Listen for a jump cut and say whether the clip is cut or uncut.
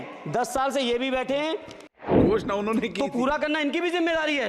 cut